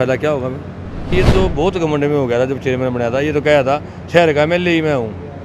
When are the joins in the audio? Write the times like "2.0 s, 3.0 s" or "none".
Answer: 1.1 s